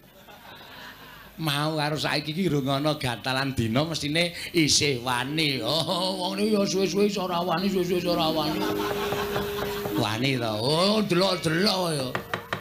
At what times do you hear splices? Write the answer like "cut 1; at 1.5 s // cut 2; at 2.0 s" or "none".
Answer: cut 1; at 2.6 s